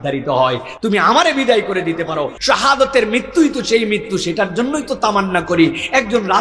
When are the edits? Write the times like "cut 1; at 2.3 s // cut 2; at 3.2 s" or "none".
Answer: cut 1; at 2.4 s